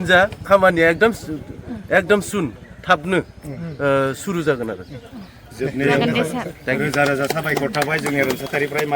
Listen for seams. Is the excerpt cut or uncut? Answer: uncut